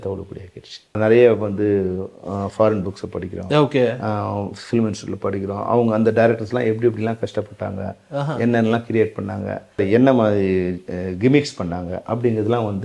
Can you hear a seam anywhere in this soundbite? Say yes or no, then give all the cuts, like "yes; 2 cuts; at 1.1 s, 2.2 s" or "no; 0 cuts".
yes; 1 cut; at 1.0 s